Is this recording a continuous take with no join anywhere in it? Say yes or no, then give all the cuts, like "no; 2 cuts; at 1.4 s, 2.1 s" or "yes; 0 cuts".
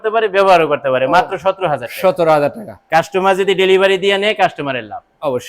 yes; 0 cuts